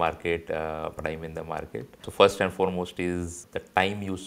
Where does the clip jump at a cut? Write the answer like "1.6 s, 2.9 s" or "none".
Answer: 2.1 s, 3.4 s